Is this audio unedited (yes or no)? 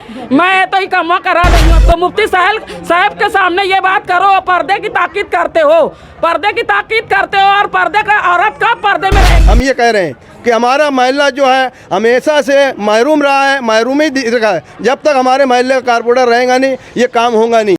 no